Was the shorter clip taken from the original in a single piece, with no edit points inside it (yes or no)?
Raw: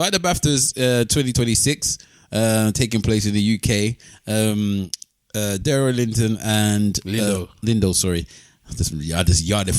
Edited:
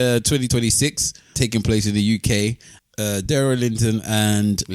no